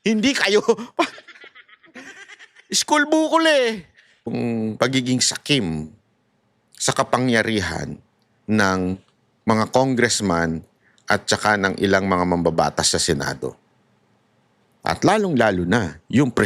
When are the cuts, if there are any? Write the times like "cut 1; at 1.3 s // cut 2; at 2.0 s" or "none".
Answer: cut 1; at 4.3 s